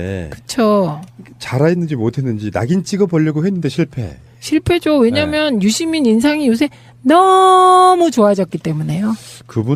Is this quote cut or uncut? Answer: cut